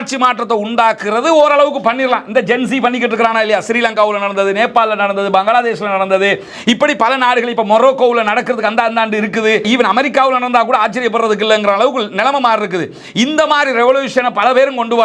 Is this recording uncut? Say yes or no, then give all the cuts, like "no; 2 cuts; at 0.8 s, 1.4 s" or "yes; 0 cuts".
no; 1 cut; at 9.6 s